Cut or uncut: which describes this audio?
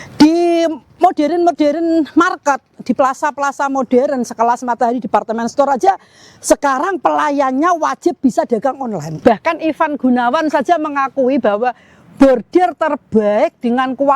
cut